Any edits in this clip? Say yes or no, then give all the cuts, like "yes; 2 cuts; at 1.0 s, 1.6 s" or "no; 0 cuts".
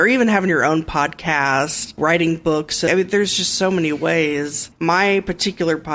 yes; 3 cuts; at 1.9 s, 2.9 s, 4.7 s